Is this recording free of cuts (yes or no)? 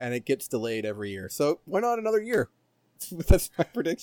yes